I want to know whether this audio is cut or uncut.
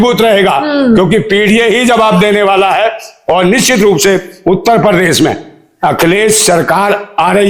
uncut